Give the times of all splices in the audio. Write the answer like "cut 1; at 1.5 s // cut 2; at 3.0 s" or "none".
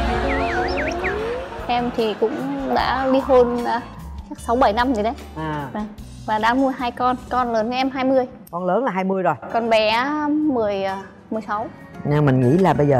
cut 1; at 1.4 s // cut 2; at 7.3 s // cut 3; at 11.9 s

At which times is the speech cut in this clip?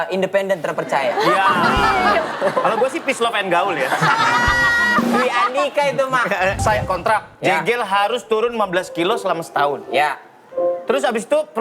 cut 1; at 2.3 s // cut 2; at 6.6 s

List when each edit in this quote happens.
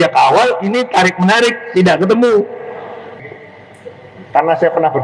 cut 1; at 3.2 s

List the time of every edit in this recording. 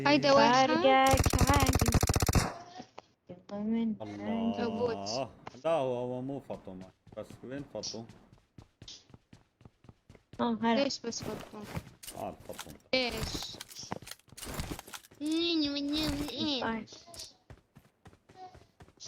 none

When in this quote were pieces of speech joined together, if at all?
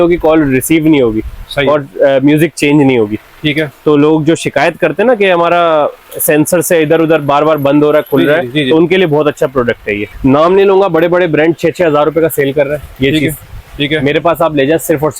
cut 1; at 10.1 s

